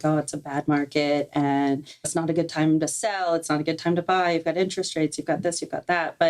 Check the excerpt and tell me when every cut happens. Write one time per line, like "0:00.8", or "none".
0:02.0